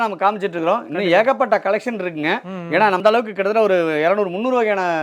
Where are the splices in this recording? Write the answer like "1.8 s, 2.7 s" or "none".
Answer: none